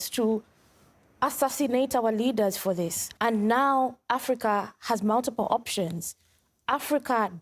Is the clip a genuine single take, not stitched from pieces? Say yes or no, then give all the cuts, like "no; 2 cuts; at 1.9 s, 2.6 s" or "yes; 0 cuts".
no; 1 cut; at 3.0 s